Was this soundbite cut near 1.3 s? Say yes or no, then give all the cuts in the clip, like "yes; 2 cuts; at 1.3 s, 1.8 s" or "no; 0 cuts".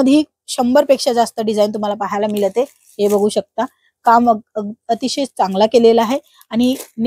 no; 0 cuts